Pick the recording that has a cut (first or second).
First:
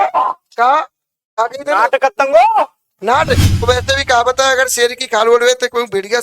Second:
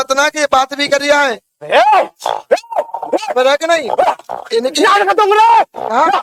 first